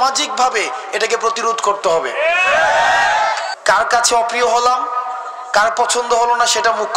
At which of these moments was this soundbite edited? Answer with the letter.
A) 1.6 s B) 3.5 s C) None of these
B